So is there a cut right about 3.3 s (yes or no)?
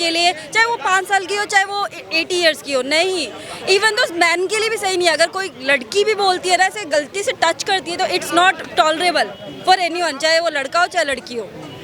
no